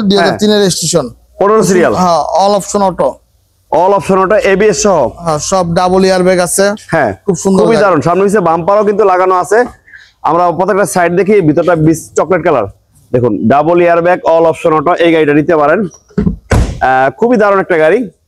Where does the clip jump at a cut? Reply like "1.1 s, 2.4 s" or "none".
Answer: none

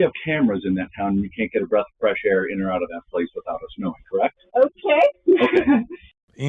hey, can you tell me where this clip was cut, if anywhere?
none

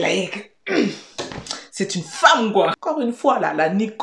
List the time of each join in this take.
2.8 s

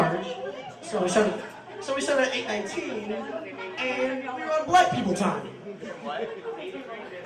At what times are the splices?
2.4 s

